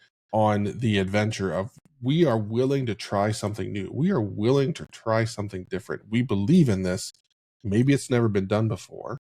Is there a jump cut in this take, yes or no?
no